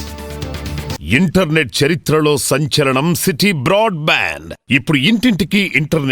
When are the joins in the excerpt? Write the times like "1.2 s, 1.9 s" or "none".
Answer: 0.9 s